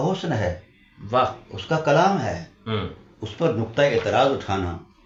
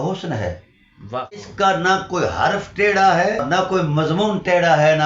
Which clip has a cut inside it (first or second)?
second